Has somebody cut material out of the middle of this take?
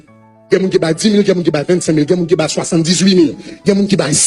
no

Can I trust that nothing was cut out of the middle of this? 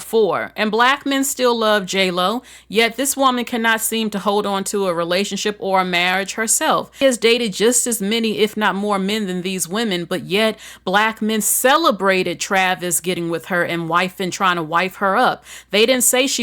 no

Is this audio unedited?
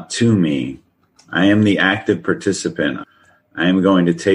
no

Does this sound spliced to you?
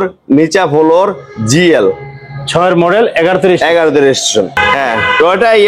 yes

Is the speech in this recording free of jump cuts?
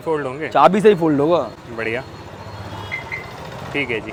yes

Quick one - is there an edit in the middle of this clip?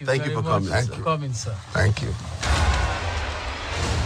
yes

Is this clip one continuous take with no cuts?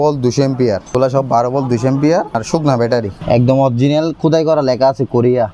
no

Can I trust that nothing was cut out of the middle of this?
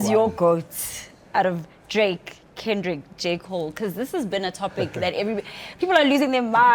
yes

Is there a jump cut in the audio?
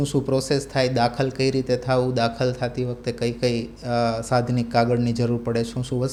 no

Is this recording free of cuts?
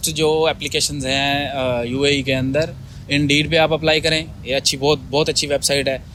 yes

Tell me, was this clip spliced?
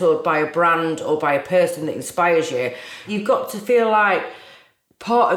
yes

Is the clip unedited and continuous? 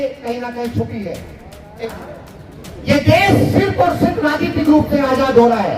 no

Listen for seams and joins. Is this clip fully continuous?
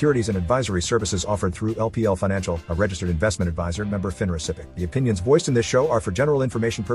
no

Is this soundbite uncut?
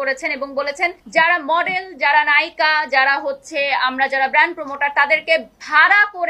no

